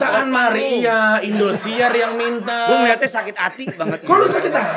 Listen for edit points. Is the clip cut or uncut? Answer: uncut